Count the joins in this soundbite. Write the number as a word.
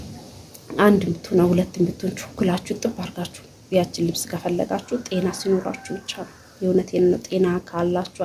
zero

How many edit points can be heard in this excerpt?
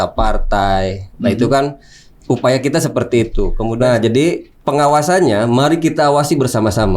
one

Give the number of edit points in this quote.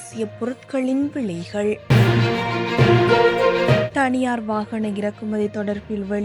two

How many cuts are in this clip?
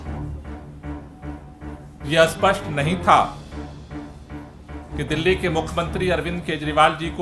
one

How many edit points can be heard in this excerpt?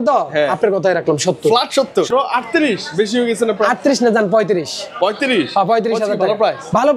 one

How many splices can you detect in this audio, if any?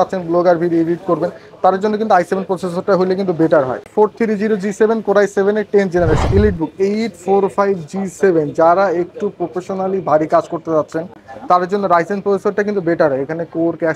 two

